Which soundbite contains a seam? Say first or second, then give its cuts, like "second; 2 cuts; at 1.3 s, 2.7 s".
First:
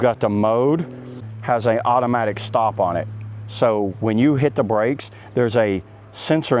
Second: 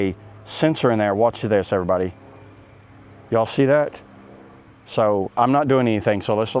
first; 1 cut; at 1.2 s